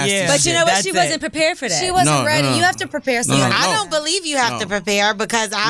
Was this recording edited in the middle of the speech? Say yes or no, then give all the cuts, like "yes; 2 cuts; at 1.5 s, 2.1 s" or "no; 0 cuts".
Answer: no; 0 cuts